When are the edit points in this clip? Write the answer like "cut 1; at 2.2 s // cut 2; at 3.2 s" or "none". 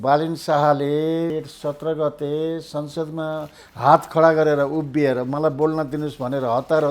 cut 1; at 1.3 s